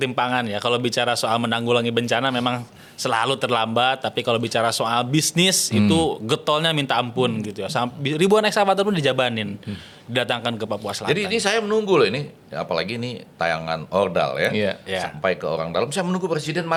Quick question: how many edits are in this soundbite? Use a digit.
0